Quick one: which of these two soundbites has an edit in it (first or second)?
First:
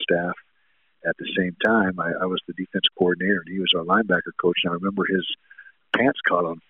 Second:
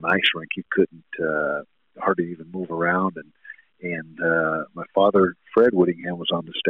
first